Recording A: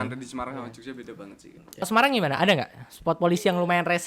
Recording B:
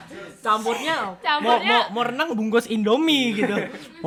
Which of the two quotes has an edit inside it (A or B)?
A